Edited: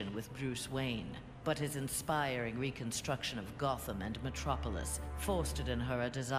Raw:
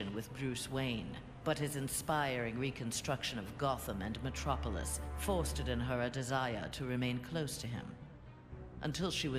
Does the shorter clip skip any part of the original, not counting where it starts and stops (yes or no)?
no